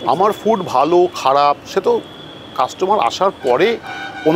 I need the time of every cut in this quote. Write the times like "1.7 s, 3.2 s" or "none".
none